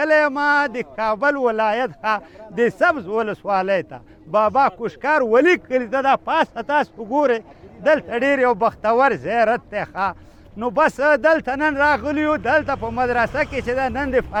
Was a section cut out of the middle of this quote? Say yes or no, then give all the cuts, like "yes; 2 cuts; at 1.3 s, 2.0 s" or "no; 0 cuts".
no; 0 cuts